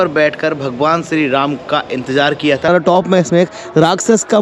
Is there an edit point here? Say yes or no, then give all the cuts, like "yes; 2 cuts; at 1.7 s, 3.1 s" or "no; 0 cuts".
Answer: yes; 1 cut; at 2.7 s